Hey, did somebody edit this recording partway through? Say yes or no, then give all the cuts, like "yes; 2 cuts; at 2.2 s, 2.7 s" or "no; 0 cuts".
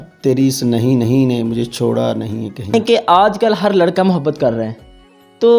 yes; 1 cut; at 2.8 s